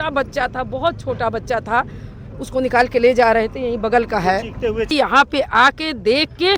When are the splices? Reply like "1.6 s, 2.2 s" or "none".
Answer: 4.9 s